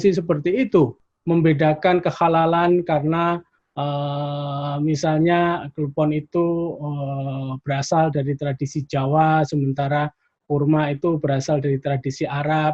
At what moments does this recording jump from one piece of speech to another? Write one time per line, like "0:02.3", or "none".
0:01.1